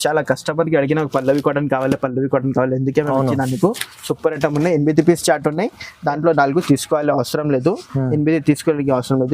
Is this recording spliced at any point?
no; 0 cuts

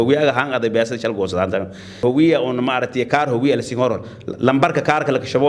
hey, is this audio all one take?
no; 1 cut; at 2.0 s

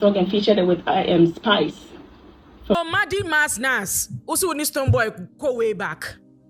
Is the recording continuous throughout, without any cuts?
no; 1 cut; at 2.8 s

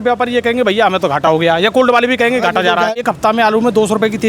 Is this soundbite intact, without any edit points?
no; 1 cut; at 3.0 s

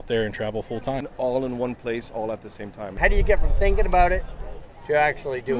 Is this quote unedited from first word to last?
no; 2 cuts; at 1.1 s, 3.0 s

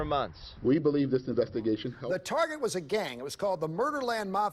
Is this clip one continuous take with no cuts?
no; 1 cut; at 1.9 s

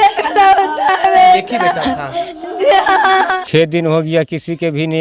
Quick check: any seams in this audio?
yes; 1 cut; at 3.4 s

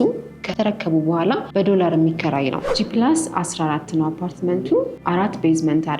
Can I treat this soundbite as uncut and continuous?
no; 3 cuts; at 1.5 s, 2.7 s, 5.0 s

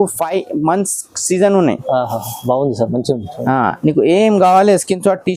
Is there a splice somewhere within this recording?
no; 0 cuts

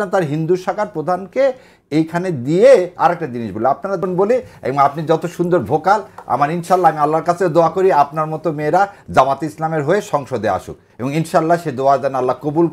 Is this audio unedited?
no; 1 cut; at 4.0 s

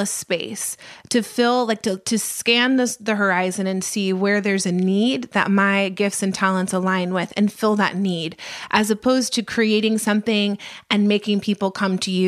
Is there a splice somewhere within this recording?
no; 0 cuts

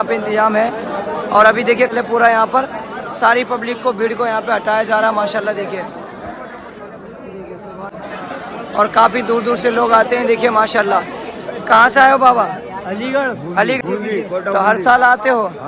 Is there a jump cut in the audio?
yes; 3 cuts; at 1.9 s, 7.9 s, 13.8 s

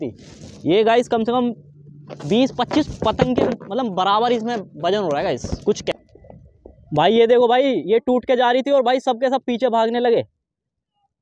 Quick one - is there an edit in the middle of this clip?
yes; 1 cut; at 5.9 s

